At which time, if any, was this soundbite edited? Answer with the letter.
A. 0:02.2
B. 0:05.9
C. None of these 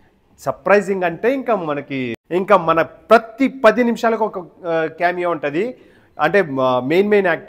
A